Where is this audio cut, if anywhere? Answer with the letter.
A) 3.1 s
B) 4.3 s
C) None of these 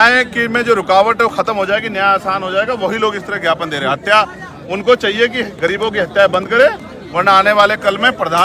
C